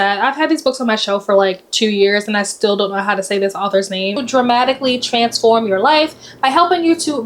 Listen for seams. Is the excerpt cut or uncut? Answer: cut